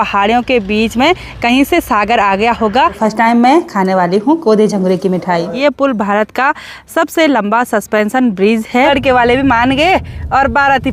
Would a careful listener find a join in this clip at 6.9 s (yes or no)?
no